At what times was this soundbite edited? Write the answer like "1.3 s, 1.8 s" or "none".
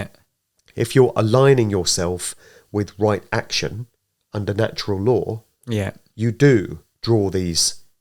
none

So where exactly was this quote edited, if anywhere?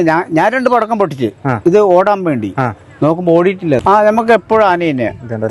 3.8 s

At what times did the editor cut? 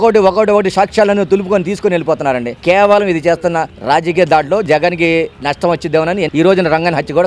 4.7 s, 6.3 s

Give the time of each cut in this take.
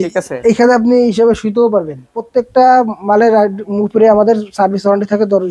2.1 s

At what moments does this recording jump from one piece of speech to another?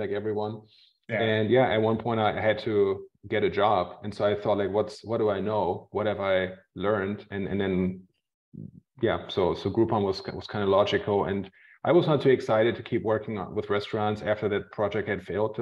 none

